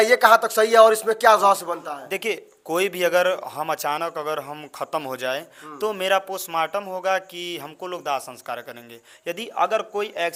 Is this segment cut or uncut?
uncut